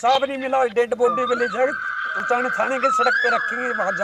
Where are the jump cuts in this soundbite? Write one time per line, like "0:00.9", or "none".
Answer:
none